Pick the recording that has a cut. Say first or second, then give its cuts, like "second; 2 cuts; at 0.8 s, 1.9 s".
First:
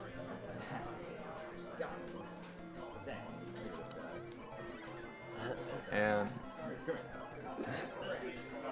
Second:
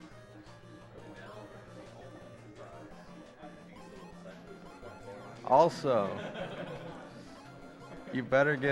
first; 1 cut; at 3.6 s